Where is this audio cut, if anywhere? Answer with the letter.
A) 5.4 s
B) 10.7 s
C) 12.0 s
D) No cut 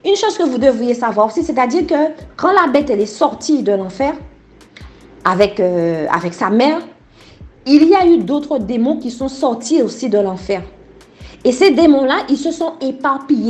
D